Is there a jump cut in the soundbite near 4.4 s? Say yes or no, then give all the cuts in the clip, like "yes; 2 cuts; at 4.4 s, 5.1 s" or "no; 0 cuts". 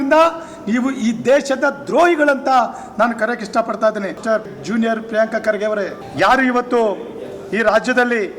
yes; 2 cuts; at 4.4 s, 6.0 s